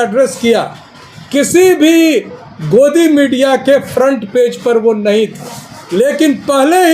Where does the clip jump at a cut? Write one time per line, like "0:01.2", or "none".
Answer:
none